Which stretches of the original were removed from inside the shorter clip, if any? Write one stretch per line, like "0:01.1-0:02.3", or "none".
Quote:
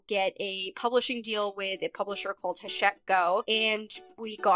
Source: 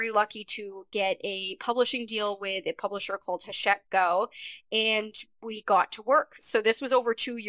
0:04.3-0:04.7